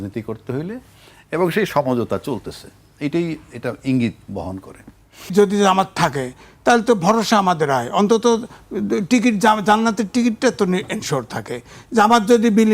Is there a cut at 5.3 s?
yes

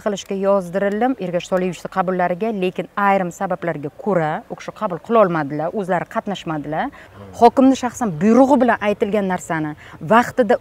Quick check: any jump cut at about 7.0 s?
yes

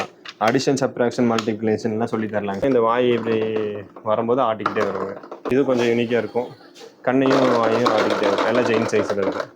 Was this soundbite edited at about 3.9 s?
no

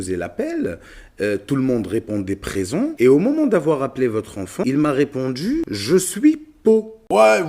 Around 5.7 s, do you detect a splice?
yes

